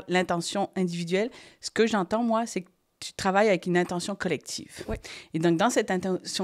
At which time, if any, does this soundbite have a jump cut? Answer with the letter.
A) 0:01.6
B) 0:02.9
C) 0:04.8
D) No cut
D